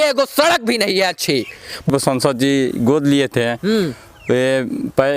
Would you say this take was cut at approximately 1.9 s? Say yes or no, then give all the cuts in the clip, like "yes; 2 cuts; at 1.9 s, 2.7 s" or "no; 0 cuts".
yes; 1 cut; at 1.9 s